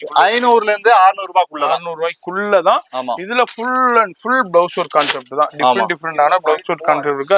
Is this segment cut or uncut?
uncut